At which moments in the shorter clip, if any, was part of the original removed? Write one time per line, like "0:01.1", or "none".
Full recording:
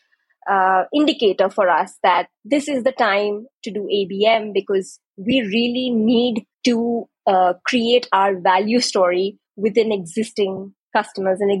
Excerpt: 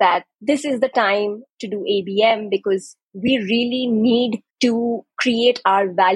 0:05.1